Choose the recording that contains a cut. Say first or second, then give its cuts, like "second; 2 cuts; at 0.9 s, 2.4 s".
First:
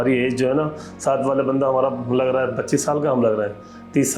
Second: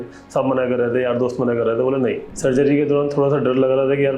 second; 1 cut; at 2.3 s